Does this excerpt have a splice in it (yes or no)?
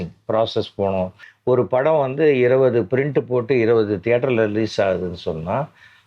yes